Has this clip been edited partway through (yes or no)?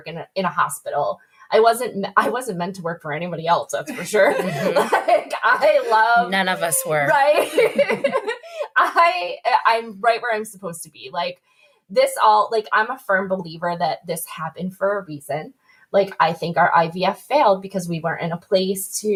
no